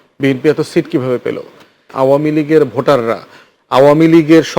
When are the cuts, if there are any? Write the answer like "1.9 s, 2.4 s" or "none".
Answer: 1.9 s